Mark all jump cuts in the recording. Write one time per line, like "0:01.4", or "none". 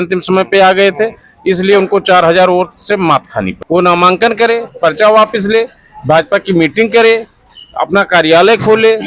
0:03.6